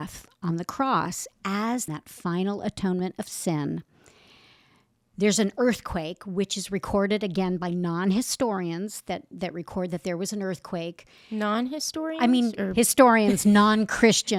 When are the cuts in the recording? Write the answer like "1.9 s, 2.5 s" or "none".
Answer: none